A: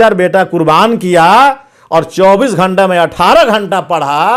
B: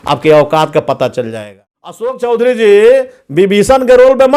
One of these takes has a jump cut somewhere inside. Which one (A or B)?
B